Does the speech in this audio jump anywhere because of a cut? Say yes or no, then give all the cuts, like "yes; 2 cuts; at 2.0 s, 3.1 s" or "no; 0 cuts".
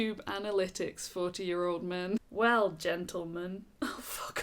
no; 0 cuts